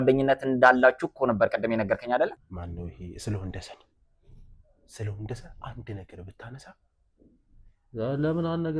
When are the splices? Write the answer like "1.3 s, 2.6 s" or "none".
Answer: 2.4 s